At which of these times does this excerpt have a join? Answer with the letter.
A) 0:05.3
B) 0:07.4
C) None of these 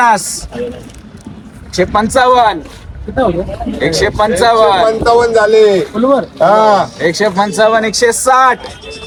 C